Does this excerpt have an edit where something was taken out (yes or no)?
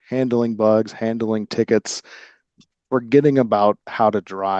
yes